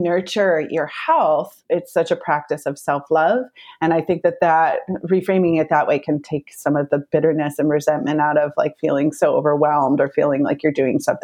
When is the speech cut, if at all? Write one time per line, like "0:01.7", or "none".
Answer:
0:01.6